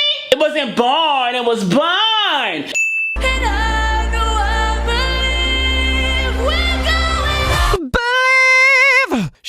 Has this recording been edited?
yes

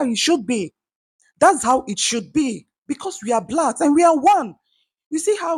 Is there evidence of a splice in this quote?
no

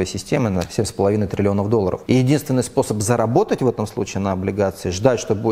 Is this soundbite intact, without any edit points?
no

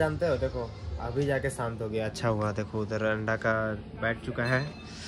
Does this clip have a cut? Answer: no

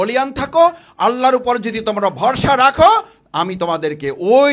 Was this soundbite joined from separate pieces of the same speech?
no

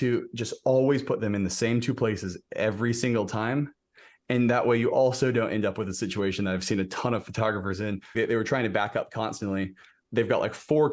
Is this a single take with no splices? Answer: no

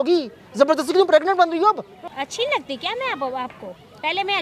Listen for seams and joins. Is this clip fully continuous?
no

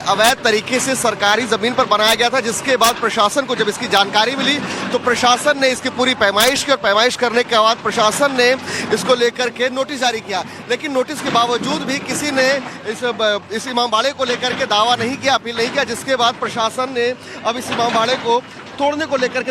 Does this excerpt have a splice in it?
no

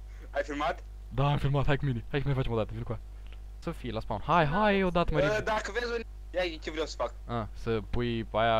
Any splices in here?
yes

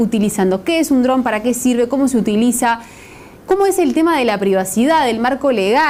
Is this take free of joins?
yes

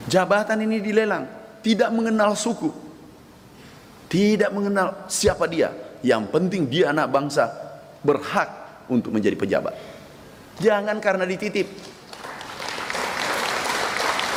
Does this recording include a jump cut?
no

